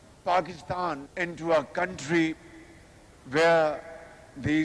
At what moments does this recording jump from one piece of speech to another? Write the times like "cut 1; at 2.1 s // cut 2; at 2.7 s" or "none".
cut 1; at 1.1 s